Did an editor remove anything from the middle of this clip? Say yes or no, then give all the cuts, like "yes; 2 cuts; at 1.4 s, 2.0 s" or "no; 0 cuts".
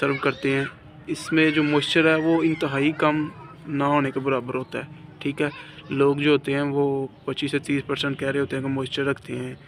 no; 0 cuts